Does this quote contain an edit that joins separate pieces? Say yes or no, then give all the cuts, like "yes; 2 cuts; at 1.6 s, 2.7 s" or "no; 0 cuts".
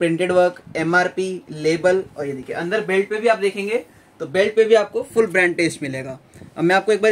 no; 0 cuts